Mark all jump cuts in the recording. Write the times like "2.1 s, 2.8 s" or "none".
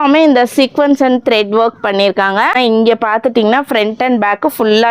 2.5 s

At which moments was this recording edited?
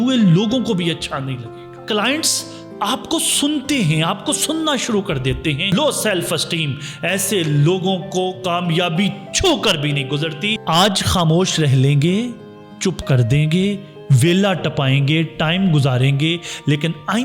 1.7 s, 5.7 s, 10.6 s

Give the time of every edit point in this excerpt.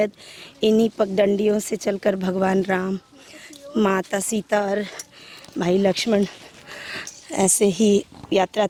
none

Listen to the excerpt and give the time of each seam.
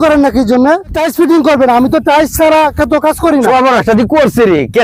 1.0 s, 3.5 s

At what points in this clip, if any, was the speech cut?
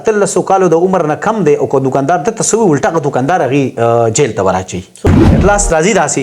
5.0 s

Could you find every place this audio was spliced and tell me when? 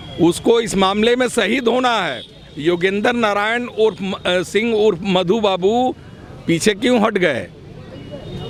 none

